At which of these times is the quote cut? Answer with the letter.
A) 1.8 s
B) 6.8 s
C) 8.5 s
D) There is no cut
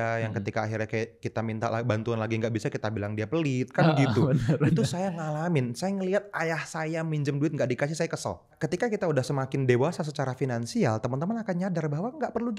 C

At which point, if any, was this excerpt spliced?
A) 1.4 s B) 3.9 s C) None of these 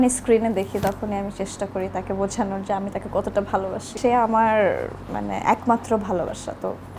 B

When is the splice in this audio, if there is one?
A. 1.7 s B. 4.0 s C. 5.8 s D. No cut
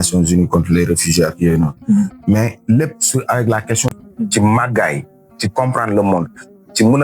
B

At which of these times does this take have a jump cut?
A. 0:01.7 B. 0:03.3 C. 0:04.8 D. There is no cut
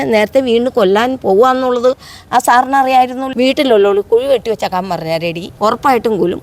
B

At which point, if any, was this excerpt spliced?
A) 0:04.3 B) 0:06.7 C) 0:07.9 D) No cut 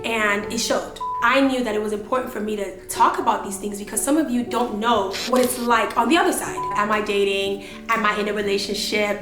B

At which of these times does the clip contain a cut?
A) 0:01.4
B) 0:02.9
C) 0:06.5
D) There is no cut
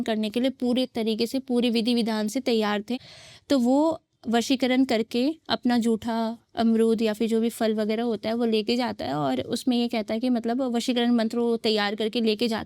B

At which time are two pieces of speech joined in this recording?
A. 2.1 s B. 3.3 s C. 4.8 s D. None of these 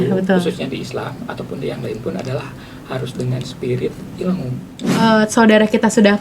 C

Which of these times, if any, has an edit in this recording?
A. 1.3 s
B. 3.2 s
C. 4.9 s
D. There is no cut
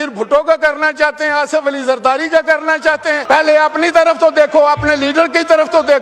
B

